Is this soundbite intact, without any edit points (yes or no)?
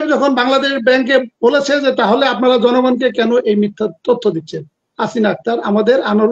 yes